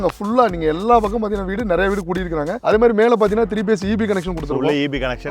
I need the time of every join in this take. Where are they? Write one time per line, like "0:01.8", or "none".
0:02.5